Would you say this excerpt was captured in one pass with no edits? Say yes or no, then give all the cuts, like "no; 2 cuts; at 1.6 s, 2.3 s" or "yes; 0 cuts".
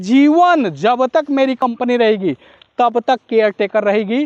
yes; 0 cuts